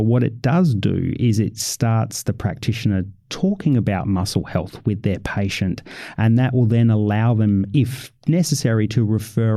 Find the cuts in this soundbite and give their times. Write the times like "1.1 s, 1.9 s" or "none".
none

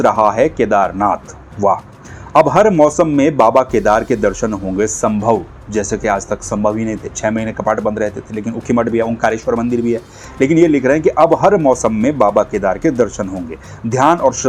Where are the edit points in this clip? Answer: none

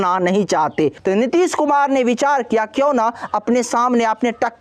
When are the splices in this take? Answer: 1.0 s

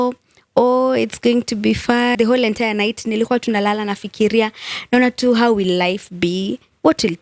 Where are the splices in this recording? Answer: 2.1 s

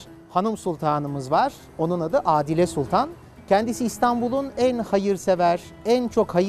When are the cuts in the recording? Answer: 3.2 s

